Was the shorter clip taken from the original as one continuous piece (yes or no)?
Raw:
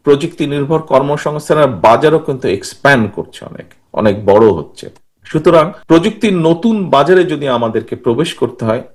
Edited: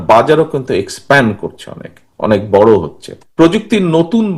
no